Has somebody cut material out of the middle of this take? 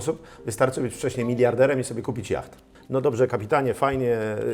yes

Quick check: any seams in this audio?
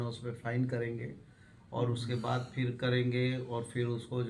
no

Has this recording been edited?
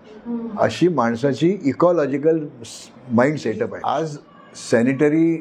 yes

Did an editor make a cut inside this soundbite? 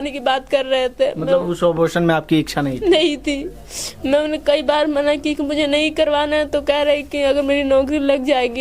no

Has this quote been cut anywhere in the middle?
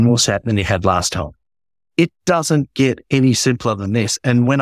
no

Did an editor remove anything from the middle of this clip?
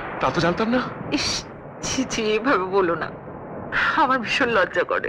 no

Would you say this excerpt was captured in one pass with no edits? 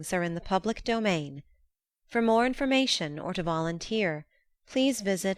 yes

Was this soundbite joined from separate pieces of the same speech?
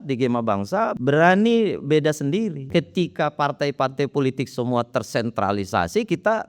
yes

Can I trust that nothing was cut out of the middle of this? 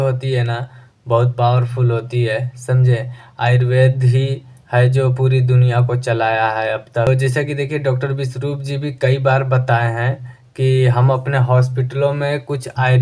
no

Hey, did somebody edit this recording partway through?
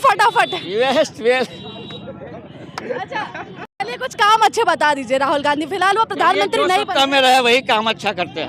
no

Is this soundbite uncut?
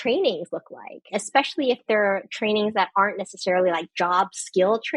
no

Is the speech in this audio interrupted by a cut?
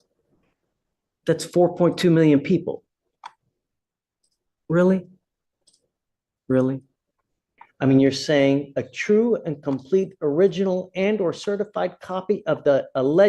yes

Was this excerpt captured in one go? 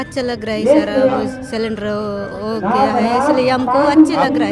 yes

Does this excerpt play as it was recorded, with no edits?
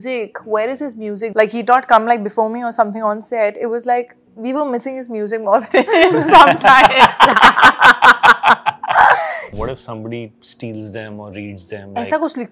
no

